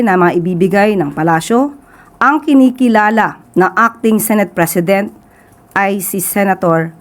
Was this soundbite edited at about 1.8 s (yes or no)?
no